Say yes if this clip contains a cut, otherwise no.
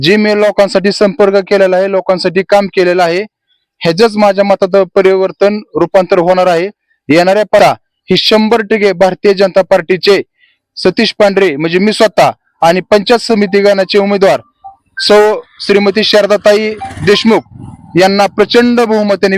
yes